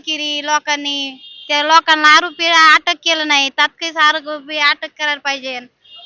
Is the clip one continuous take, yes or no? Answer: yes